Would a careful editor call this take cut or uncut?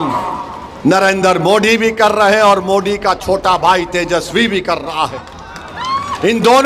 uncut